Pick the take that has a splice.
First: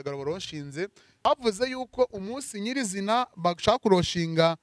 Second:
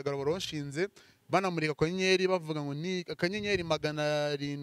first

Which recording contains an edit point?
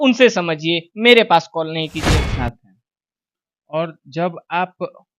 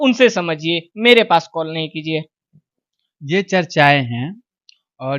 first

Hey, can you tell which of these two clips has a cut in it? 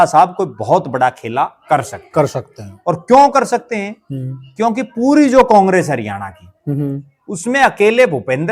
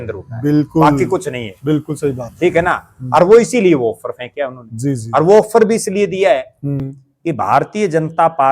second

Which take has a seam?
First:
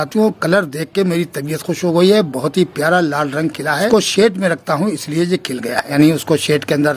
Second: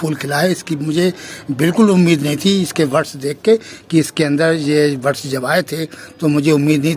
first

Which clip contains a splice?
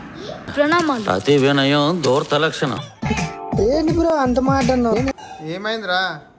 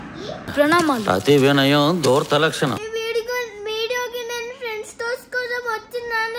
second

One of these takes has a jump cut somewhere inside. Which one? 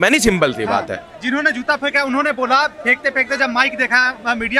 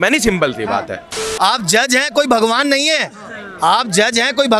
second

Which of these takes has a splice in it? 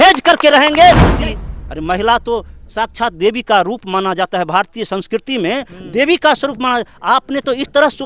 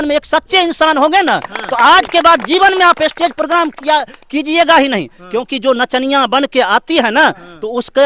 first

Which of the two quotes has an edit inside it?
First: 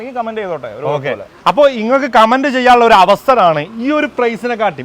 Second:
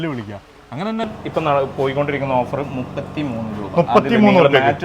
second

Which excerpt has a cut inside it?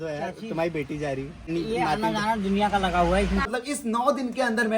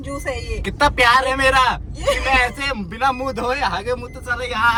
first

